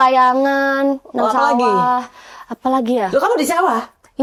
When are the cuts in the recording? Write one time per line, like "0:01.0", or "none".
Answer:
none